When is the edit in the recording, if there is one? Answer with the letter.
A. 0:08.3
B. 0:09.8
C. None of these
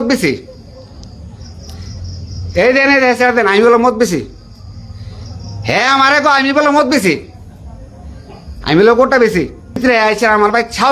B